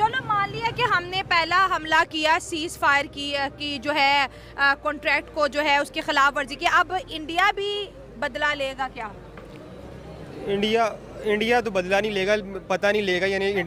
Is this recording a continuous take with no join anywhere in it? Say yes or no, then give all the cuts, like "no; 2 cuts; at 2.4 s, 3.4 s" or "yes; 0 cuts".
yes; 0 cuts